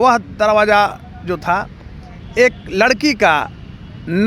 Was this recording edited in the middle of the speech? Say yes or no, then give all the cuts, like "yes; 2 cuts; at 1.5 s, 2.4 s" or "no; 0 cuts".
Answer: no; 0 cuts